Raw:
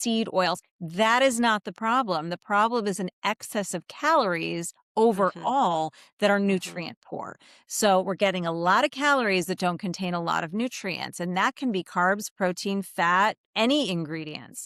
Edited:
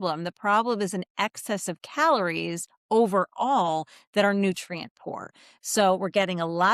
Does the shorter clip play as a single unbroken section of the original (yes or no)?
yes